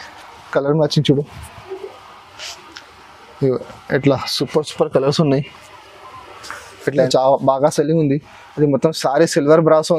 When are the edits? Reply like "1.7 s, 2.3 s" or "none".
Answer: 7.0 s